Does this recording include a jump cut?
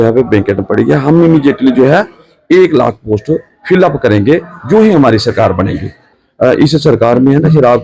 yes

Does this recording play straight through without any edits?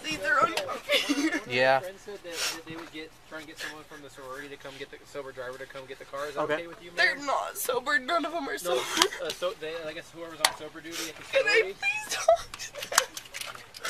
yes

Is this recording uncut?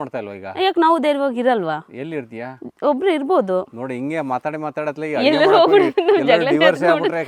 yes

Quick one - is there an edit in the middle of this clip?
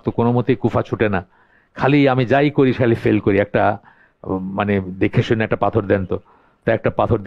no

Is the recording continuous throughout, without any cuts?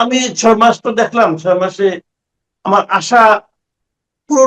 yes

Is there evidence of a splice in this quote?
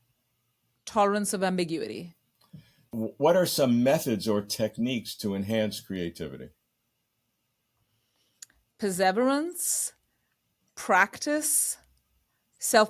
yes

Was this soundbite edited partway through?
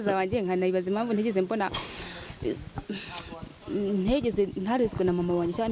no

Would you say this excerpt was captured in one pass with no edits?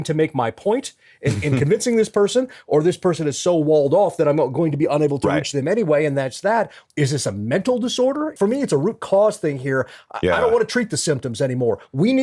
no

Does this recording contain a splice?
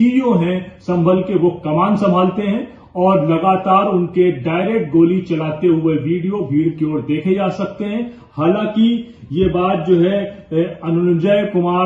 no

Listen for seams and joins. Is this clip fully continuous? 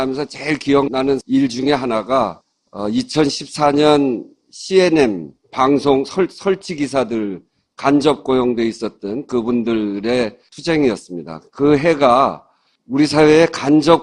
yes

